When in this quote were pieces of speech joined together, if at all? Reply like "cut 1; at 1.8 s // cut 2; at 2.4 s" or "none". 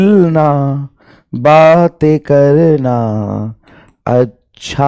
none

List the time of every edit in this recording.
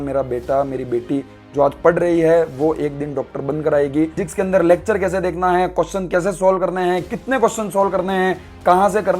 cut 1; at 4.2 s

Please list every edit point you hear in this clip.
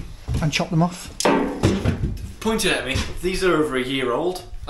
cut 1; at 1.6 s

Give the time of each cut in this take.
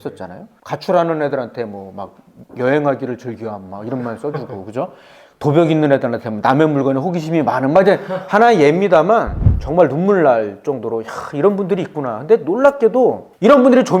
cut 1; at 9.4 s

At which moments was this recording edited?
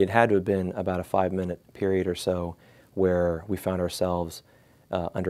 none

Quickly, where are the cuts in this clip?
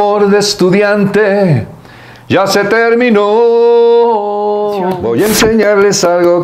cut 1; at 5.0 s

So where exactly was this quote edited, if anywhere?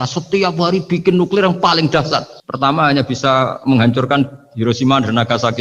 none

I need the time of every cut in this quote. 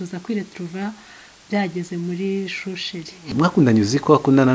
cut 1; at 3.3 s

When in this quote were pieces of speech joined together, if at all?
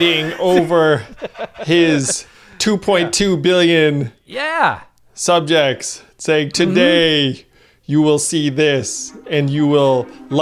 none

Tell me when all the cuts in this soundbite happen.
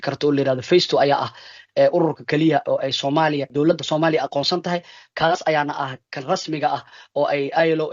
cut 1; at 3.5 s

